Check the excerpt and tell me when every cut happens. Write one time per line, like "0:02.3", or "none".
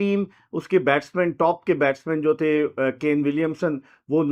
none